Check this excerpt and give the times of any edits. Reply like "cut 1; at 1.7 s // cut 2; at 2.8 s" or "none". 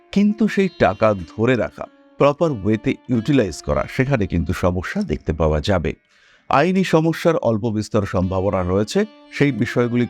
none